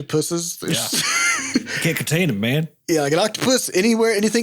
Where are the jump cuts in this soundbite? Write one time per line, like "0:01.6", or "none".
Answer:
0:02.8